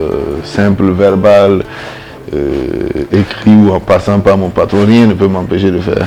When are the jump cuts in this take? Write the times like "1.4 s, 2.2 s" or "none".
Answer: none